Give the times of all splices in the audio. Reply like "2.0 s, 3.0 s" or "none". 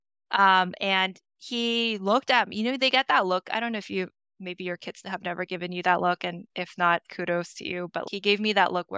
8.0 s